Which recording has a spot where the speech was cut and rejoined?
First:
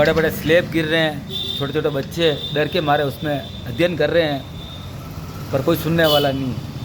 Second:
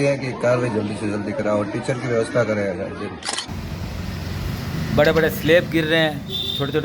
second; 1 cut; at 3.4 s

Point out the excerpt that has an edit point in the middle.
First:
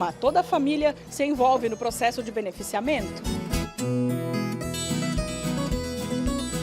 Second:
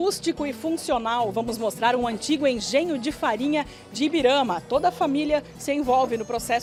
first; 1 cut; at 3.1 s

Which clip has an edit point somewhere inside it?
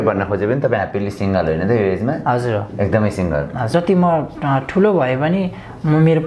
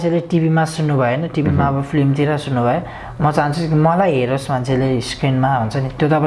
first; 1 cut; at 3.7 s

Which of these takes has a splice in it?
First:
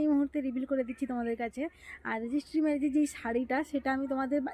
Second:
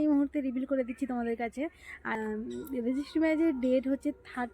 second; 1 cut; at 2.1 s

